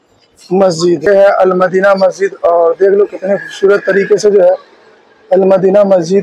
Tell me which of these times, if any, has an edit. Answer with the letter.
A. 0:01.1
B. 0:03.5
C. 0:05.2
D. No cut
A